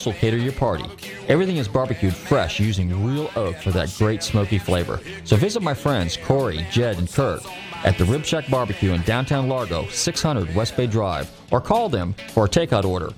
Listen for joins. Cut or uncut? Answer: uncut